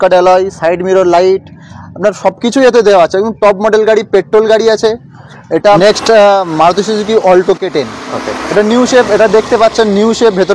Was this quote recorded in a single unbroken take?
no; 1 cut; at 5.8 s

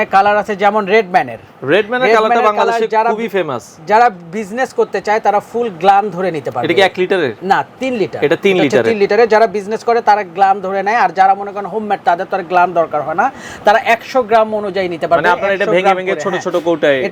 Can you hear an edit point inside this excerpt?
no; 0 cuts

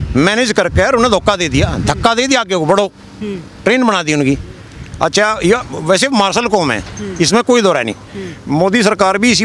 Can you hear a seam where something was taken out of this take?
no; 0 cuts

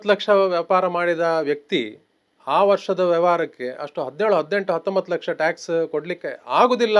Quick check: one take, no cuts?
yes; 0 cuts

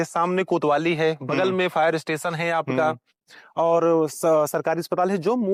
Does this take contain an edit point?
no; 0 cuts

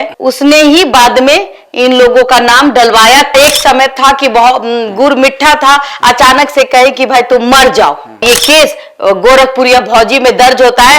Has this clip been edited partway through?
yes; 2 cuts; at 3.3 s, 8.2 s

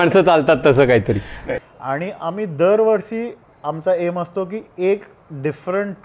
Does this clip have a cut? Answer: yes; 1 cut; at 1.7 s

